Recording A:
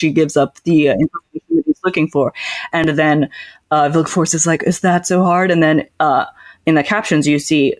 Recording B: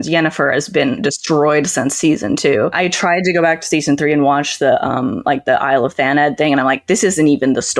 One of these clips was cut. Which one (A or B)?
B